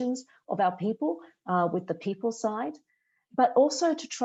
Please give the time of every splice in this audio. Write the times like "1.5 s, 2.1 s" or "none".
none